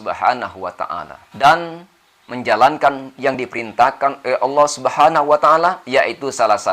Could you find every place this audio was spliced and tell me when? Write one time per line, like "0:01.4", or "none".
0:01.4